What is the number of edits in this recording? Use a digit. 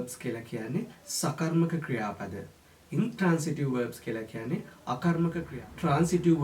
1